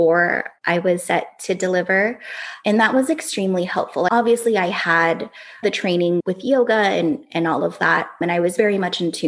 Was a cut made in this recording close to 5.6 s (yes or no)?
yes